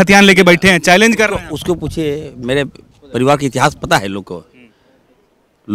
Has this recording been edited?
no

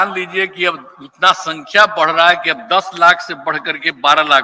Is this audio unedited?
yes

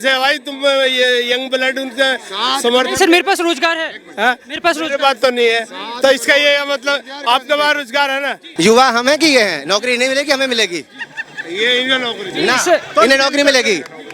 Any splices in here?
yes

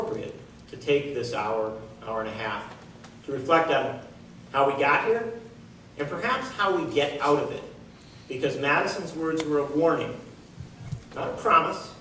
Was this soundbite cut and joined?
no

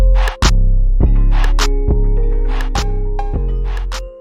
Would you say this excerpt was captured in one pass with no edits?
yes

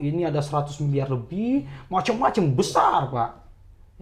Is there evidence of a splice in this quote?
no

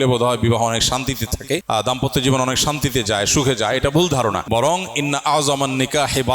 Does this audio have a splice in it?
yes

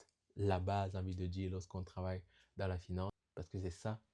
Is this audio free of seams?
no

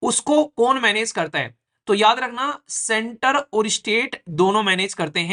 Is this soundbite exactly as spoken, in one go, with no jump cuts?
yes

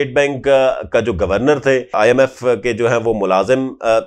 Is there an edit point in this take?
no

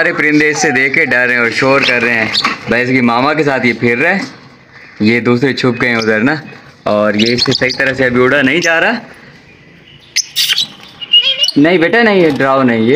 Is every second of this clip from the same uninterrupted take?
yes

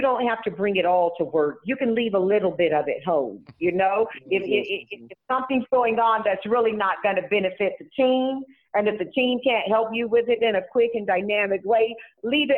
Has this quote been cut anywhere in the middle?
no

